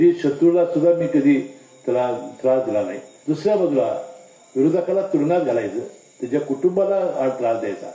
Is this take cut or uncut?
cut